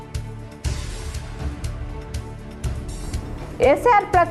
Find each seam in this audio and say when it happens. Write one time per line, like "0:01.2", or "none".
0:01.1